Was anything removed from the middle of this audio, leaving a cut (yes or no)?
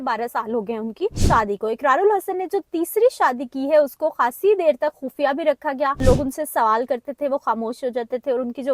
yes